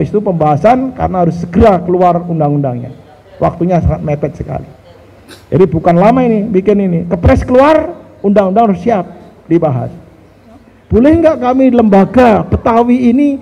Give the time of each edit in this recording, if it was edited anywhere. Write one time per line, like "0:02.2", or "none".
0:10.7

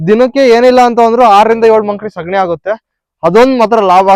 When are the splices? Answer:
none

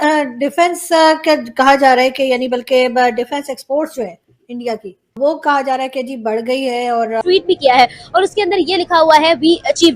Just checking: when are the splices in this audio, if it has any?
0:07.2

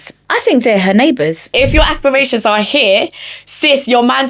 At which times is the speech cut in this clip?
0:01.5

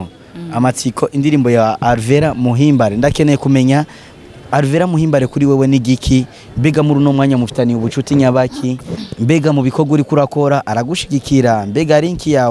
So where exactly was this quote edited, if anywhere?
none

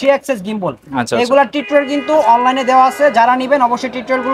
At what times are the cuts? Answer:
none

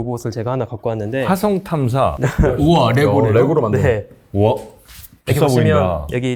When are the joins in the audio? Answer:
none

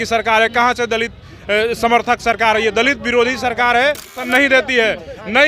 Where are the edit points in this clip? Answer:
0:04.2

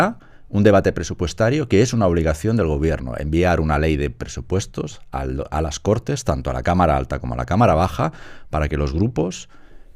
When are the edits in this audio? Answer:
none

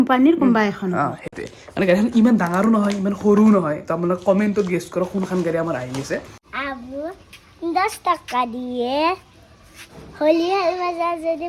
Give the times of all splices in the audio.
0:06.4

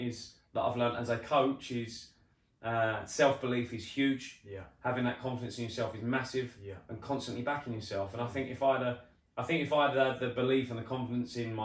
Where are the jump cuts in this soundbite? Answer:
none

